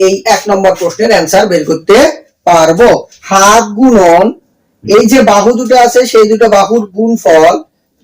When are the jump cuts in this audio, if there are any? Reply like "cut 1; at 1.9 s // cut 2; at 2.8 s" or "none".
cut 1; at 3.1 s